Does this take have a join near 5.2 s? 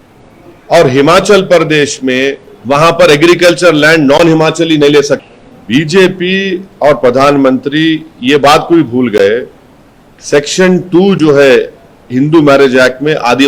yes; 2 cuts; at 2.5 s, 5.2 s

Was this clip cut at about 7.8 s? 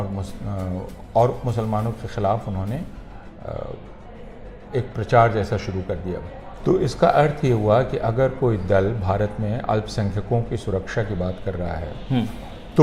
no; 1 cut; at 6.5 s

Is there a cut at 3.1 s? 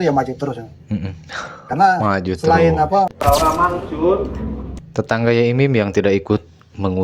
yes; 1 cut; at 3.1 s

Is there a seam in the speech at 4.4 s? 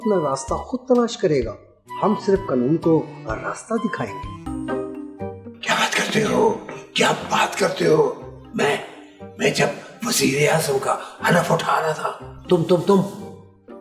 yes; 1 cut; at 4.4 s

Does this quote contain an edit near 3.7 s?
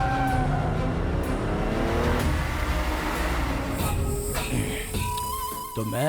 yes; 1 cut; at 3.7 s

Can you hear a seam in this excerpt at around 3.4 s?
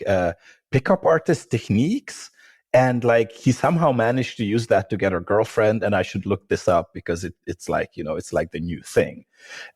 yes; 1 cut; at 3.4 s

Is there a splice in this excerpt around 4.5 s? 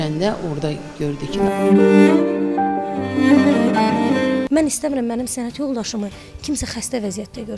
yes; 1 cut; at 4.5 s

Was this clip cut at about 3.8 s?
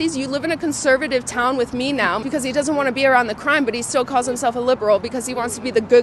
no; 1 cut; at 2.2 s

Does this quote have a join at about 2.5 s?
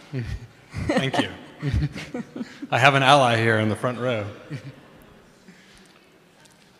yes; 1 cut; at 2.5 s

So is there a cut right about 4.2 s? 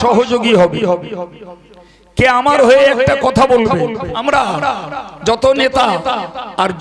yes; 1 cut; at 4.2 s

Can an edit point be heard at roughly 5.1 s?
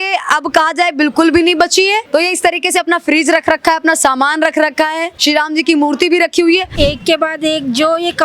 yes; 3 cuts; at 2.1 s, 5.1 s, 6.7 s

